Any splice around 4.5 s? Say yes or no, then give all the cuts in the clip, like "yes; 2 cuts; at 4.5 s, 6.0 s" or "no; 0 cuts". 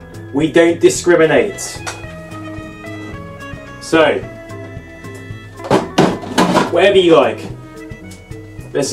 no; 0 cuts